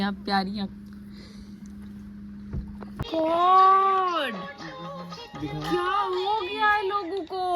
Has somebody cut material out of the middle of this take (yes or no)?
yes